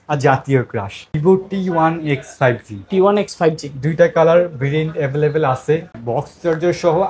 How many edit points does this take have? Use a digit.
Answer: 2